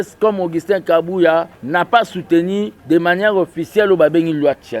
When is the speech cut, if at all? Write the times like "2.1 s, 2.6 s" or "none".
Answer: 1.6 s, 2.8 s